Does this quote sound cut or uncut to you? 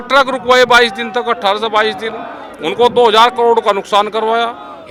uncut